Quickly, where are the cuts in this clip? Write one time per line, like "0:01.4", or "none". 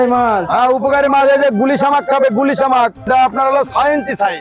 0:03.1